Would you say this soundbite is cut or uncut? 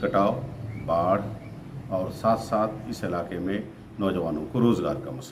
uncut